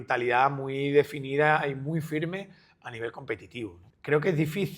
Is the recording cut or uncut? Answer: cut